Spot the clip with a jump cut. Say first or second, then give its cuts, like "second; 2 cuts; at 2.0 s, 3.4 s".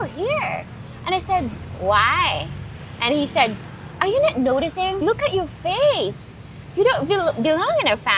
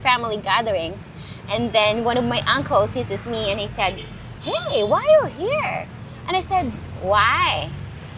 first; 1 cut; at 5.0 s